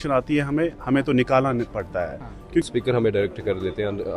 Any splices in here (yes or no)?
yes